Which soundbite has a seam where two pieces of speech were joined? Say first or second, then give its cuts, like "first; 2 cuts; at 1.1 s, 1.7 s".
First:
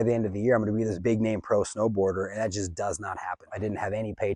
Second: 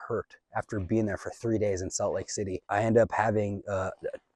first; 2 cuts; at 1.0 s, 3.5 s